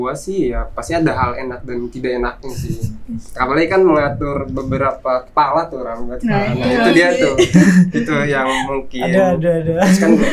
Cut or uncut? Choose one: uncut